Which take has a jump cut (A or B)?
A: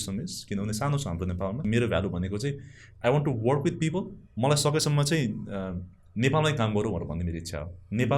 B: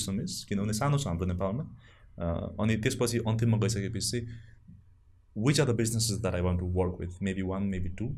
A